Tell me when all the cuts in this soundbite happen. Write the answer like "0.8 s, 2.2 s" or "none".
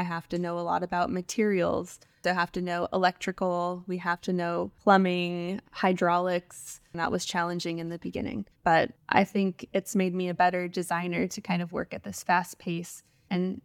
4.7 s, 8.8 s